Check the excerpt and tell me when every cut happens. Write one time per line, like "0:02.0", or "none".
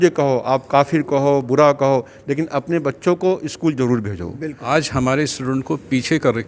0:04.6